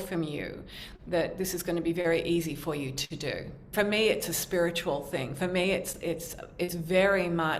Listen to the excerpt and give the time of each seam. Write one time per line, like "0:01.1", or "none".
0:03.7